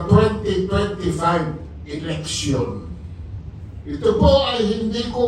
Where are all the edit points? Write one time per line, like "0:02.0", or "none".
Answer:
none

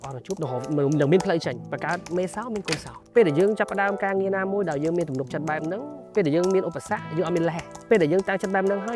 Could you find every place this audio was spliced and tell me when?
0:01.7
0:02.9
0:07.7

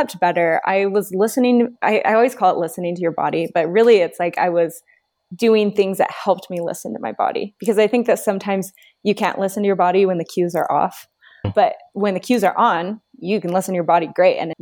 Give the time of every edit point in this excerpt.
0:11.5

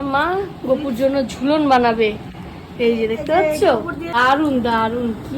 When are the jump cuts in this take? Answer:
0:04.2

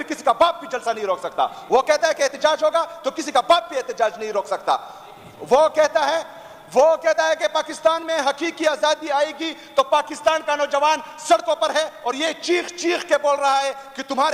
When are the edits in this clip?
none

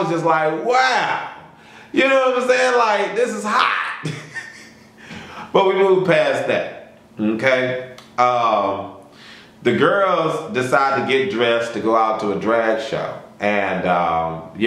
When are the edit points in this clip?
none

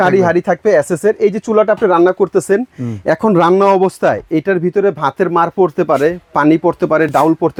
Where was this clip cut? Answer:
none

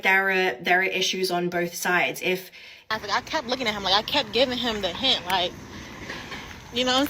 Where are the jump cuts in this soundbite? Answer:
0:02.8

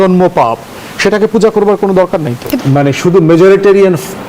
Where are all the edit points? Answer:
0:02.5

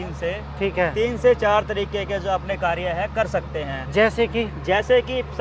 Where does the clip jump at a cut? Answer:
none

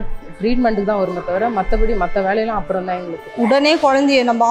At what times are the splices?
0:03.1

